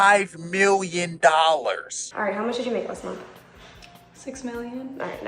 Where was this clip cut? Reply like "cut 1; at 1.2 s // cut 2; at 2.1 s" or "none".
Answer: cut 1; at 2.0 s